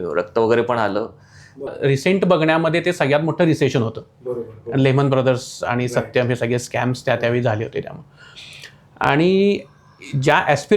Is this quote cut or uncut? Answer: cut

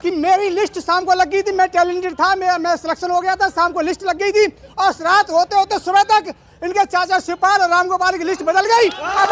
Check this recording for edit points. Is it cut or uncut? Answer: uncut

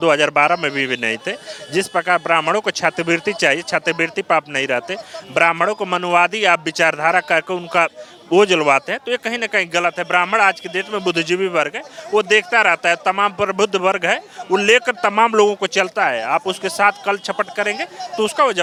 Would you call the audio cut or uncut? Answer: uncut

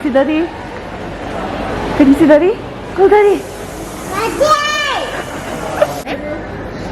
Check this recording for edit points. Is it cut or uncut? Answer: cut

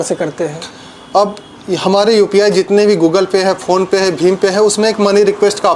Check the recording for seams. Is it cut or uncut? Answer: uncut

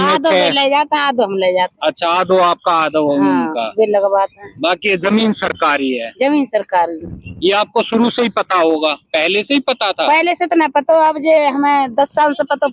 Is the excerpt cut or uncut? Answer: uncut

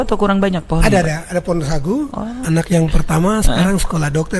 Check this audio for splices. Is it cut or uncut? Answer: cut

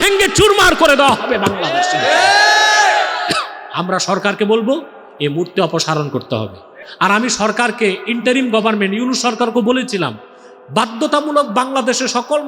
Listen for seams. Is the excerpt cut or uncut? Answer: cut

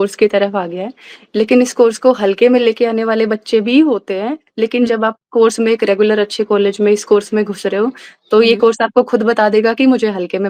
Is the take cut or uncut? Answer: uncut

